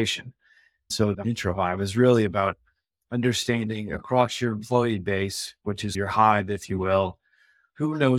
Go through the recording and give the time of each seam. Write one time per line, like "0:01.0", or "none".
0:01.0